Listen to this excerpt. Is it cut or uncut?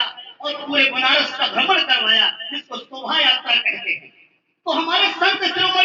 uncut